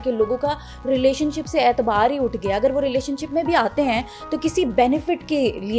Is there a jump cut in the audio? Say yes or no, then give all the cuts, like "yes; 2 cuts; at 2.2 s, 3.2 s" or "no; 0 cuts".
no; 0 cuts